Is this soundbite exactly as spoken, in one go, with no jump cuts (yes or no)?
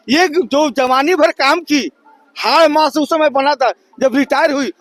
yes